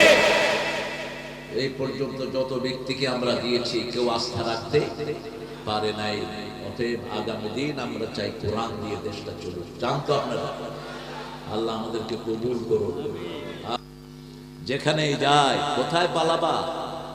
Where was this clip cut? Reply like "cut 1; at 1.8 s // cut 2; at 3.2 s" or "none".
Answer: cut 1; at 13.8 s